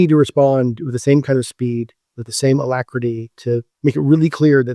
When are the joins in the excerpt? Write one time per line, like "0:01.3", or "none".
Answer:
0:03.7